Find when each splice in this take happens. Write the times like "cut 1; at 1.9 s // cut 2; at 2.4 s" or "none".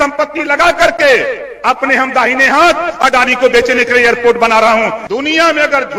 cut 1; at 5.0 s